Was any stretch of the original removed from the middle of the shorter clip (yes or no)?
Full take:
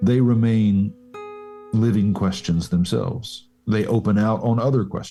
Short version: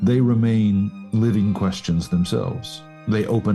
yes